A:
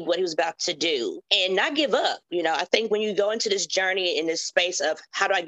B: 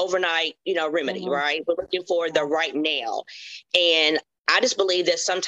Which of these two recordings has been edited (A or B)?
A